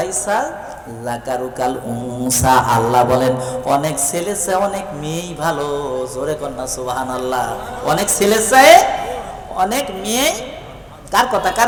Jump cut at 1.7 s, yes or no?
no